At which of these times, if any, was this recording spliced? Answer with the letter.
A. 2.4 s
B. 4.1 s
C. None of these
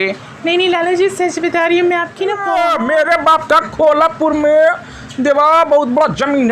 A